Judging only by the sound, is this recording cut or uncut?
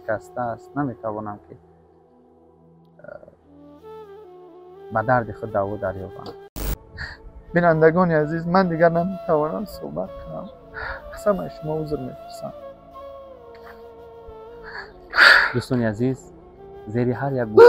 cut